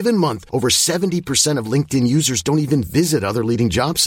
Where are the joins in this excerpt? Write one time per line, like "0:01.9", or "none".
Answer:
none